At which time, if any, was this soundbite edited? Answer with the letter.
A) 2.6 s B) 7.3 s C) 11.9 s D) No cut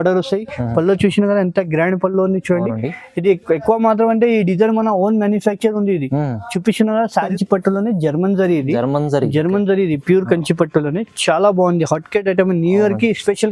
B